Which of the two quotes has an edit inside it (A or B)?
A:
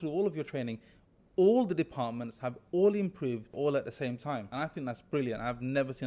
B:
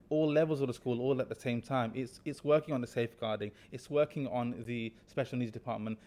A